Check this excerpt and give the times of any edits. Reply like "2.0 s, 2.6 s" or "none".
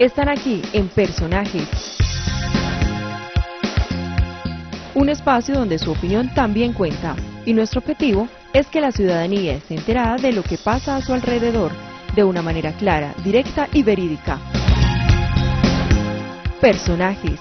none